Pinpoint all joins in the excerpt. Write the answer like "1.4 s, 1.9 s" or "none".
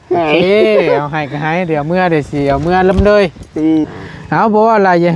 4.0 s